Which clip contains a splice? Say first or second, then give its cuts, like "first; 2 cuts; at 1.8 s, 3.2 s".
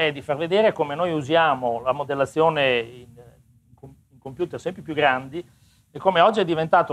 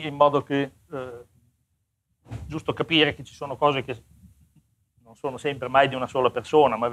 first; 1 cut; at 2.5 s